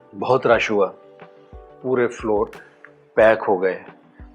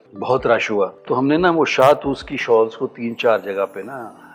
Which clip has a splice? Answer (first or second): second